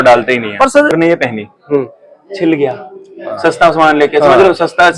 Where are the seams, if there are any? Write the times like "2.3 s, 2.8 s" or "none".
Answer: 0.9 s